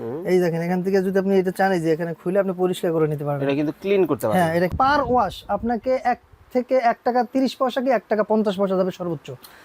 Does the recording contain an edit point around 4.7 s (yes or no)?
yes